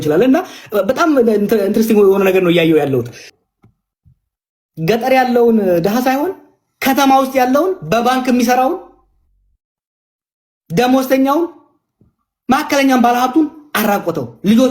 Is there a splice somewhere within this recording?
yes; 1 cut; at 3.2 s

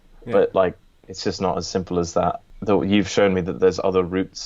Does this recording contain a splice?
yes; 1 cut; at 2.5 s

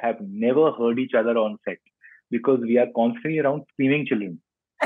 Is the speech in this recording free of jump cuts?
yes; 0 cuts

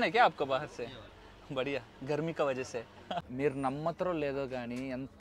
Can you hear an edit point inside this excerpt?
yes; 1 cut; at 3.3 s

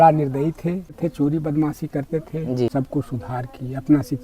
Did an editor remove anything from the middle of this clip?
yes; 2 cuts; at 1.0 s, 2.7 s

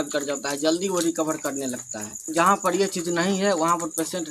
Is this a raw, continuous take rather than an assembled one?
no; 1 cut; at 2.3 s

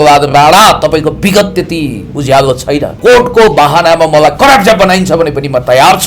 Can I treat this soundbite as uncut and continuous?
no; 1 cut; at 2.9 s

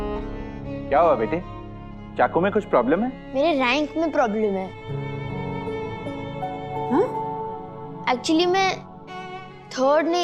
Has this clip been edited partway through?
yes; 1 cut; at 3.2 s

